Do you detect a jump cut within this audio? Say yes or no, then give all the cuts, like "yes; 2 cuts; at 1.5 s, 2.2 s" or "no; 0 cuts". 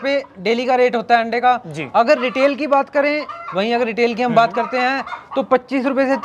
no; 0 cuts